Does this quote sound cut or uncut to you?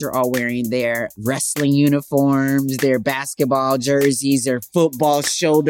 cut